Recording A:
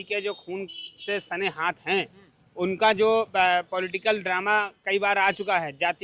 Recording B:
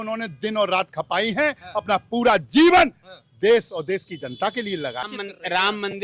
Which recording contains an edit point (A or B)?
B